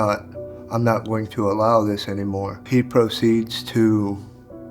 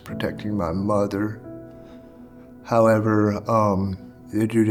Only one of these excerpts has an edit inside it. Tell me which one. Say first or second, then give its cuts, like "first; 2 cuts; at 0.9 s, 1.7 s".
first; 1 cut; at 2.6 s